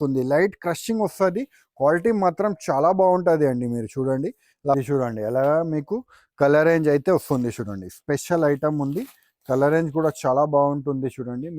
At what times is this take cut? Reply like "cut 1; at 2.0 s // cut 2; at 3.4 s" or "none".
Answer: cut 1; at 4.8 s

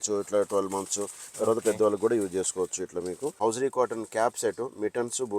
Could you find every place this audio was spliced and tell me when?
cut 1; at 3.4 s

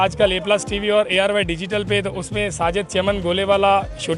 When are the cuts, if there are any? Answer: none

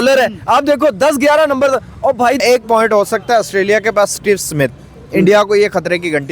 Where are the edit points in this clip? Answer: cut 1; at 2.4 s

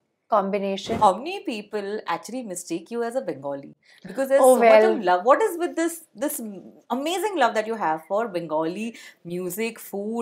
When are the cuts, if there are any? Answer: cut 1; at 1.0 s

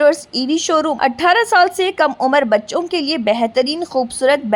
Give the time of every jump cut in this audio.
cut 1; at 0.9 s

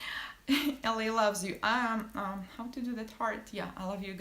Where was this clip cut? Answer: cut 1; at 1.6 s

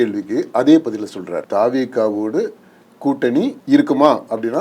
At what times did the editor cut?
cut 1; at 1.4 s // cut 2; at 3.6 s

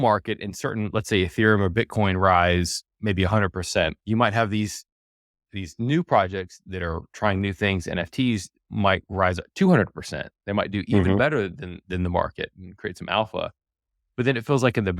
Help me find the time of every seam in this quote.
cut 1; at 4.0 s

